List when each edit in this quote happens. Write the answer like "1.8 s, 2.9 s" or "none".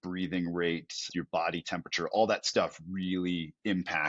1.1 s